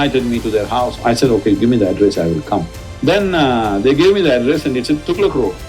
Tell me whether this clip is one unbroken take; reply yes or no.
no